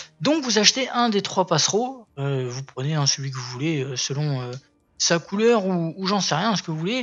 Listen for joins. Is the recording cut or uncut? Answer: cut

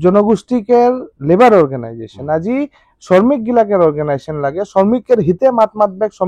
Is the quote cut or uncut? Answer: uncut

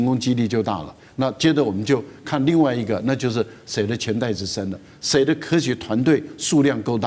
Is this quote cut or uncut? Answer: uncut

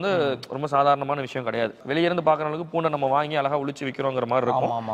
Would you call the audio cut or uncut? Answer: uncut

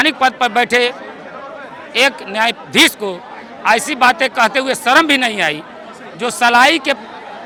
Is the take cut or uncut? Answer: uncut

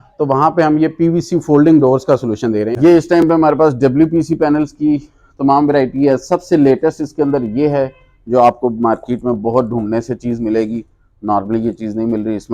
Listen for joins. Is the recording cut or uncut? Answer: cut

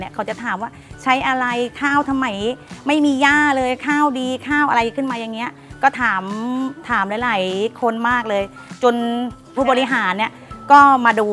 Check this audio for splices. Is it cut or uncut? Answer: uncut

